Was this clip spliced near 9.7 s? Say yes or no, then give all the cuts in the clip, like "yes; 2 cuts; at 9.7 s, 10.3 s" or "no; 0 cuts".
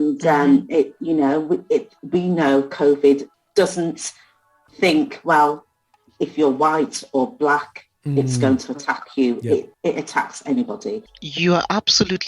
yes; 3 cuts; at 3.4 s, 9.7 s, 11.2 s